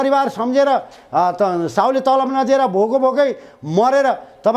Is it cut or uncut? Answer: uncut